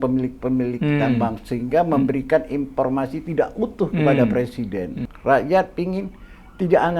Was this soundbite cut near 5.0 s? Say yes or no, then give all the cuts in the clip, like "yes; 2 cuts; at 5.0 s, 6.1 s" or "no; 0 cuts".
yes; 1 cut; at 5.0 s